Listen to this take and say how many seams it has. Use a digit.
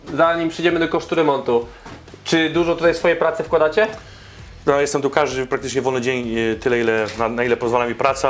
0